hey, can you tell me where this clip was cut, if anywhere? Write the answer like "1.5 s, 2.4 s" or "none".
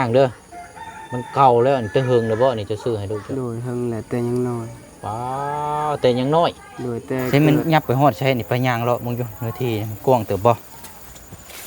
7.3 s